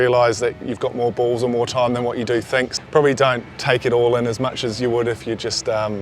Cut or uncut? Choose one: cut